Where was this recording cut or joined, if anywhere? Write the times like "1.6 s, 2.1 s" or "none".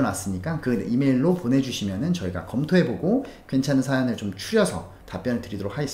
5.0 s